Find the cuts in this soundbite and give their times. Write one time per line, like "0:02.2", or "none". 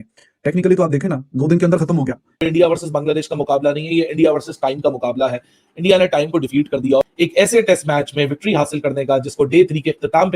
0:02.3